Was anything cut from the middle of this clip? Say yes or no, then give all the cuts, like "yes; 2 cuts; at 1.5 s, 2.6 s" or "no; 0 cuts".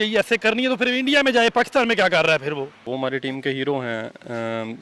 no; 0 cuts